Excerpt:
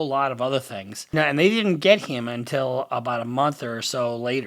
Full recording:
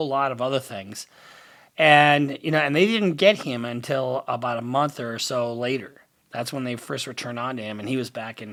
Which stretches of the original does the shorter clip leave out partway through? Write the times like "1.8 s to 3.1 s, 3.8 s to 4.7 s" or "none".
1.0 s to 2.4 s